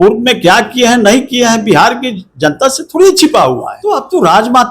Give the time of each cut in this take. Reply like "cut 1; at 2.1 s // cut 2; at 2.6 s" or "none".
cut 1; at 3.7 s